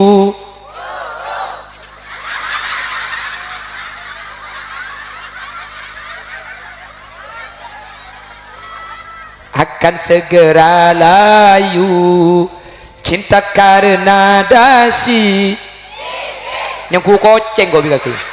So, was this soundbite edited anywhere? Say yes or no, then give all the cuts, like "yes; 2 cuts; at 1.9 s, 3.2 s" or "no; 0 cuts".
no; 0 cuts